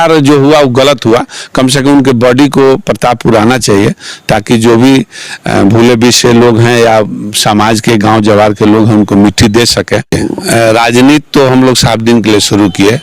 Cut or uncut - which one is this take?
cut